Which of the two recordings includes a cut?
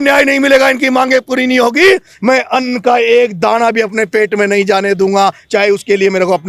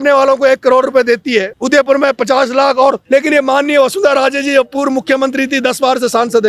second; 2 cuts; at 1.5 s, 3.0 s

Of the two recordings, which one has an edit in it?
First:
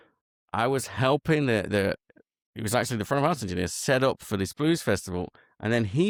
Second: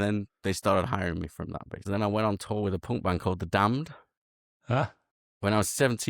second; 1 cut; at 1.9 s

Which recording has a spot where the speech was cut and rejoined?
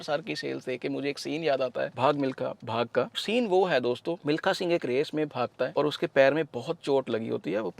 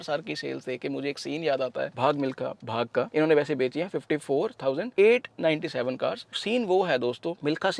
first; 1 cut; at 3.1 s

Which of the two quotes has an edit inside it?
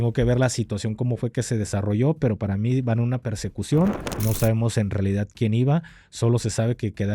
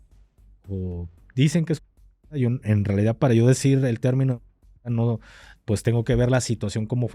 first; 1 cut; at 4.1 s

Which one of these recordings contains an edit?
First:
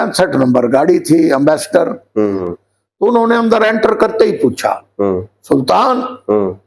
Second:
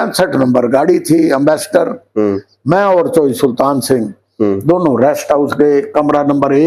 first; 1 cut; at 2.5 s

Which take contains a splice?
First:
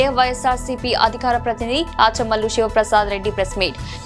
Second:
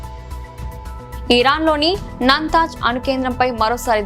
second; 1 cut; at 1.0 s

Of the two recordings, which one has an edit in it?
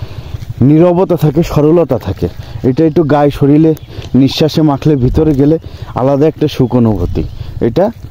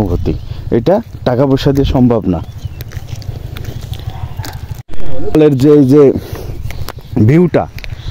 second; 1 cut; at 5.3 s

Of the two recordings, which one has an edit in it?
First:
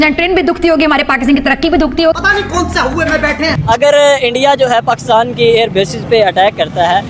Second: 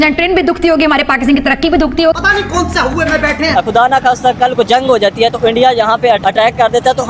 second; 2 cuts; at 3.5 s, 6.2 s

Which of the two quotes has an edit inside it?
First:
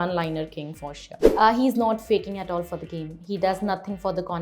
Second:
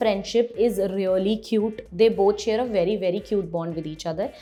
first; 1 cut; at 1.1 s

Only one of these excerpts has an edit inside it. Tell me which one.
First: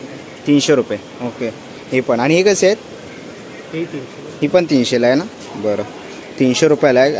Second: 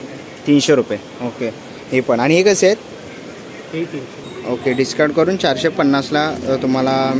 second; 1 cut; at 4.2 s

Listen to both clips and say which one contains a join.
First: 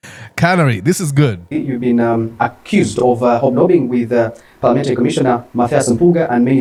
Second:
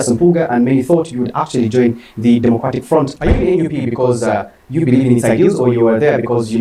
second; 1 cut; at 3.1 s

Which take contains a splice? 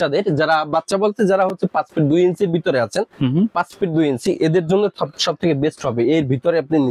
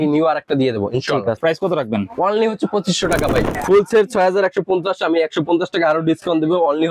second; 2 cuts; at 1.4 s, 3.6 s

